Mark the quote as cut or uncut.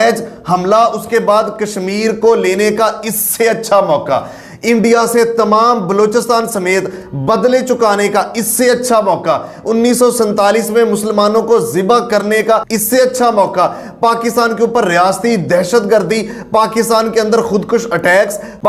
uncut